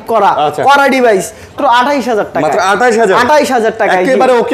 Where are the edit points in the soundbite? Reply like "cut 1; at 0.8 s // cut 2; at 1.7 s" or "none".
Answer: cut 1; at 1.5 s